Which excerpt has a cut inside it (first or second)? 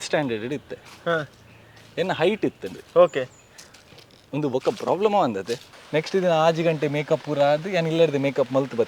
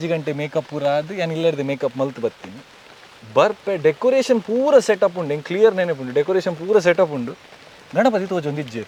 first